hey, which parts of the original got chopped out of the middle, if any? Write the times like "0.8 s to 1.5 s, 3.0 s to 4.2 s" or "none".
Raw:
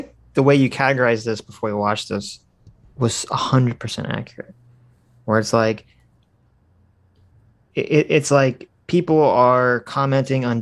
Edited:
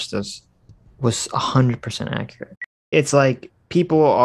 4.9 s to 8.1 s